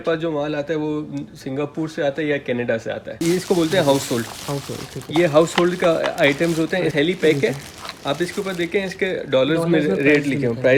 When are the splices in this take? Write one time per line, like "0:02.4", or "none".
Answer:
0:03.2
0:06.9